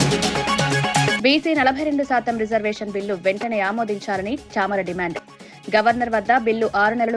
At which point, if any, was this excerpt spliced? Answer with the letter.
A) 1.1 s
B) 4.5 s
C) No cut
A